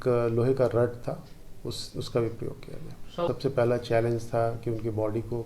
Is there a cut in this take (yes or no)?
yes